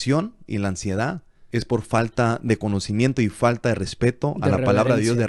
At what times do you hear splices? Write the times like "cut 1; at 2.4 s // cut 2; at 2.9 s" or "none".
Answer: cut 1; at 1.3 s